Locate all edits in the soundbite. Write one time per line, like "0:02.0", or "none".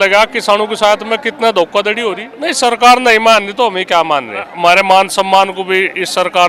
0:02.3
0:04.5